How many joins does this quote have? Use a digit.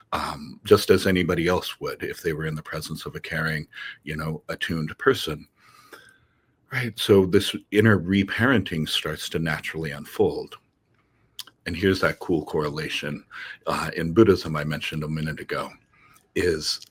0